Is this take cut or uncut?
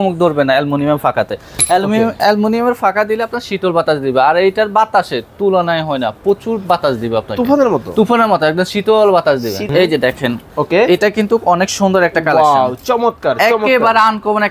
cut